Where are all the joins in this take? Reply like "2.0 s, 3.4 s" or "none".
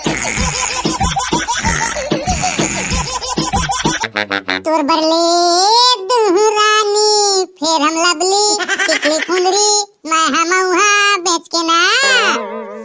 4.0 s